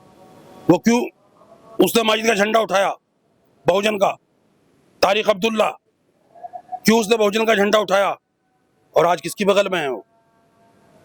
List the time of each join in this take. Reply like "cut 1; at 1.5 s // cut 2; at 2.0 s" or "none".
none